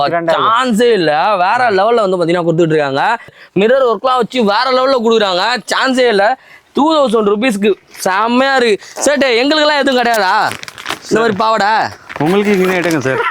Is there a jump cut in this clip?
yes; 1 cut; at 3.4 s

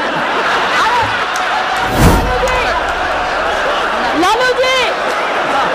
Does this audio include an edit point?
yes; 1 cut; at 2.0 s

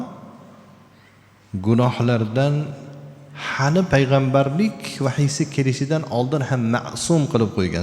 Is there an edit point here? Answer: no; 0 cuts

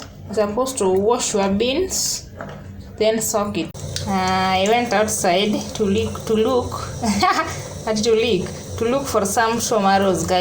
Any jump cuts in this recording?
yes; 1 cut; at 3.7 s

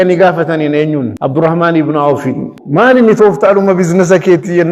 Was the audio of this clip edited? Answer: yes; 2 cuts; at 1.2 s, 2.6 s

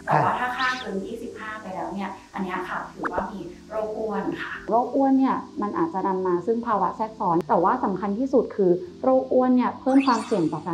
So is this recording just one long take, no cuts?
no; 2 cuts; at 4.5 s, 7.4 s

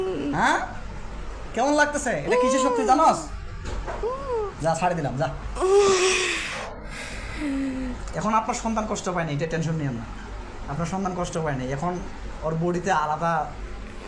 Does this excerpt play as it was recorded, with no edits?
yes; 0 cuts

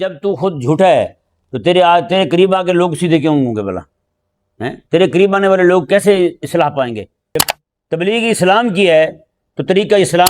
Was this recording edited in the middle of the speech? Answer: yes; 1 cut; at 7.2 s

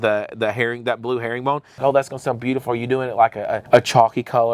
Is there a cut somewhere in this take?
yes; 2 cuts; at 1.7 s, 3.6 s

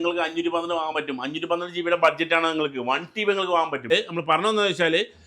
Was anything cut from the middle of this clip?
yes; 1 cut; at 3.9 s

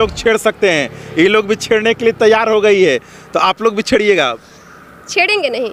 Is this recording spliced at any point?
no; 0 cuts

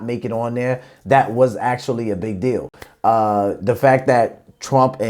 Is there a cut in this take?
no; 0 cuts

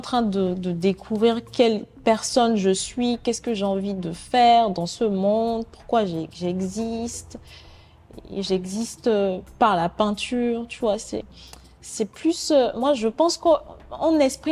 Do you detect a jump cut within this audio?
no; 0 cuts

